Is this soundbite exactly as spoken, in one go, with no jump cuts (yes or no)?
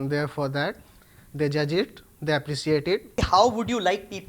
no